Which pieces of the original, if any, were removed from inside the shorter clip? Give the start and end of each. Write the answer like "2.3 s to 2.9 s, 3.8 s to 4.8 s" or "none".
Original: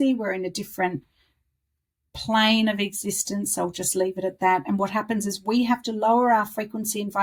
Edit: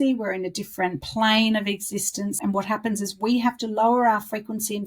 1.0 s to 2.2 s, 3.5 s to 4.6 s